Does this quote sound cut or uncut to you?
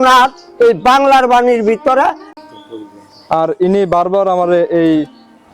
cut